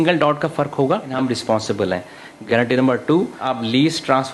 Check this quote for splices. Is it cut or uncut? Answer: cut